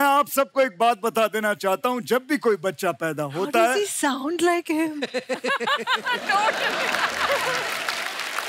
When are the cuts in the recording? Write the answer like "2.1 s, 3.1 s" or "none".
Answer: none